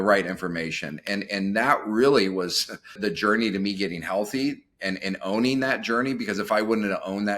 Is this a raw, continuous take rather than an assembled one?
no; 1 cut; at 3.0 s

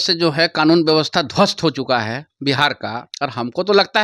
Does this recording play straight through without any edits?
no; 1 cut; at 3.1 s

